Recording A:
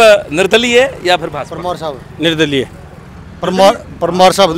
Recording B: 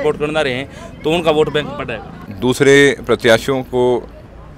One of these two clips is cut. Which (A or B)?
B